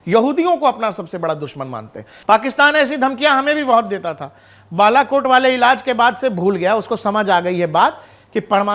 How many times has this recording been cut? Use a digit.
1